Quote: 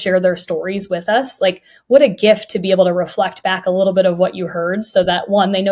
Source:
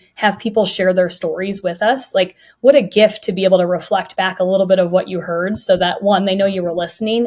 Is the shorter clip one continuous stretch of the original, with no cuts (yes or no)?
yes